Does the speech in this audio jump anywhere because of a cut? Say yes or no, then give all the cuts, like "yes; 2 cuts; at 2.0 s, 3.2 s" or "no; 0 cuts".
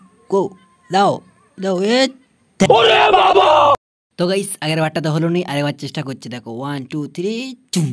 no; 0 cuts